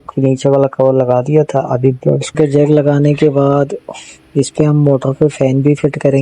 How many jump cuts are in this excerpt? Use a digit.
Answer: 1